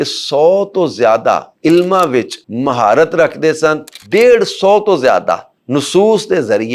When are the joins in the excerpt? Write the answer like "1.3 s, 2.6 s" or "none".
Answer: 1.5 s, 2.4 s, 4.0 s

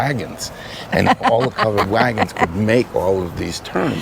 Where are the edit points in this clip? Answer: none

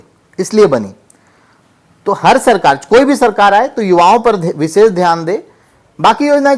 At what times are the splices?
none

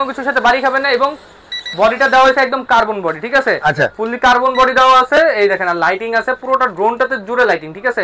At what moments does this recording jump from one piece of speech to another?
none

